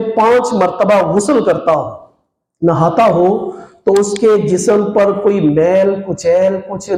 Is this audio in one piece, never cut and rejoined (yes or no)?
yes